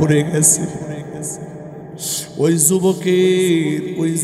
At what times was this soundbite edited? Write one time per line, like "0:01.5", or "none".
none